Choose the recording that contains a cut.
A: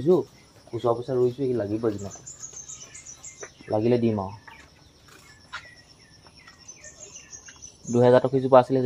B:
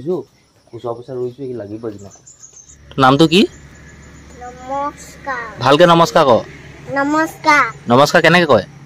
B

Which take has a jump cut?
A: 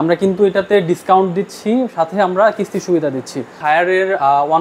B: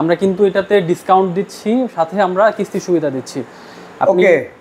A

